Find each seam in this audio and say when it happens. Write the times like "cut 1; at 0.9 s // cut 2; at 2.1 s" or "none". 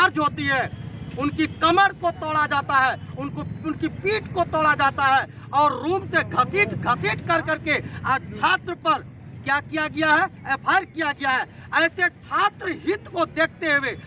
none